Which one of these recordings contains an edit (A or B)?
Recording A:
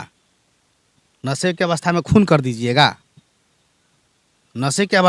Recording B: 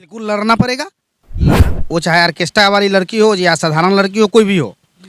B